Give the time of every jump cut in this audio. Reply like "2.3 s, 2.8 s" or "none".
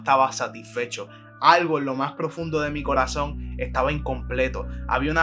none